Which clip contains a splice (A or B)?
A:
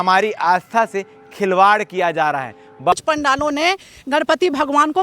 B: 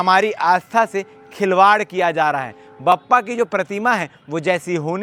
A